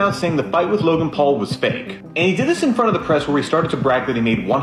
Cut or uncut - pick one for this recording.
uncut